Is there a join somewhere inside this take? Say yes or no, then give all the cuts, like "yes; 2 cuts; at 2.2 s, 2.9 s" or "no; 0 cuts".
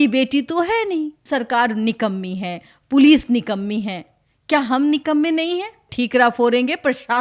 yes; 2 cuts; at 1.2 s, 5.8 s